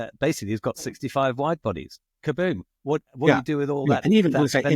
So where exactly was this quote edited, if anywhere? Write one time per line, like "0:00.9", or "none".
none